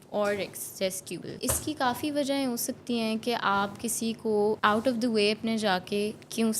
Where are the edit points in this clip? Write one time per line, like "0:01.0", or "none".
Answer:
0:01.3
0:04.6